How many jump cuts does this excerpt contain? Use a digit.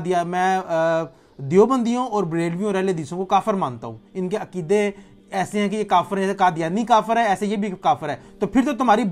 0